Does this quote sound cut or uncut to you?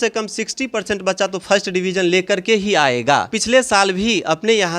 cut